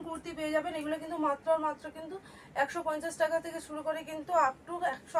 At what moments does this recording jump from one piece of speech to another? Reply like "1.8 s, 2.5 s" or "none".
none